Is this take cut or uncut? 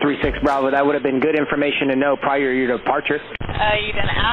cut